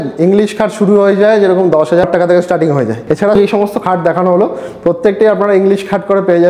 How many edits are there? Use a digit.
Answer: 2